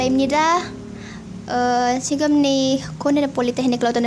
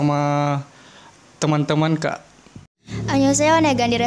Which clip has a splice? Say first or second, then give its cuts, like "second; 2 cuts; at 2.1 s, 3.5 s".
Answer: second; 1 cut; at 2.9 s